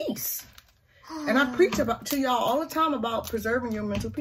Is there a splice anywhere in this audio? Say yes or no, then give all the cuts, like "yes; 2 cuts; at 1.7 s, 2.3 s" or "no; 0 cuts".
no; 0 cuts